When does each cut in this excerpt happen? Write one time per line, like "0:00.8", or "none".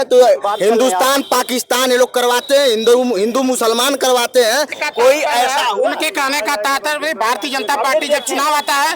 0:04.8